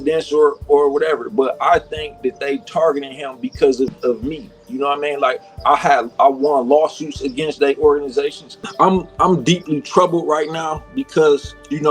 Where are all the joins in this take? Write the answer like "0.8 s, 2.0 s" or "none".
8.6 s